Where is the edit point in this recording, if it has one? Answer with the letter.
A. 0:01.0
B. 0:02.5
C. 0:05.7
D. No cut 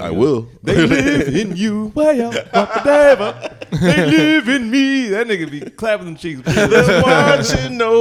D